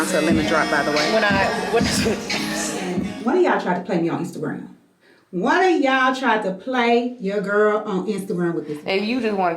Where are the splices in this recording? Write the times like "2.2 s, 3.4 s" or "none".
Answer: 3.0 s, 8.7 s